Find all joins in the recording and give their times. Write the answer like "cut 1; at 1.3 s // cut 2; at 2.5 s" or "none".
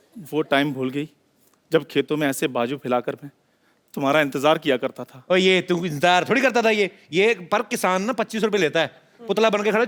none